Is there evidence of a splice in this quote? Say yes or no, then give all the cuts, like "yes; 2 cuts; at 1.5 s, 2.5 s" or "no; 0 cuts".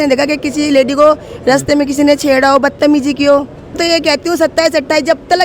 yes; 1 cut; at 3.8 s